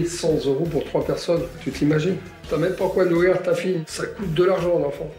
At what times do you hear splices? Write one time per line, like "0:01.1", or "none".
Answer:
0:02.5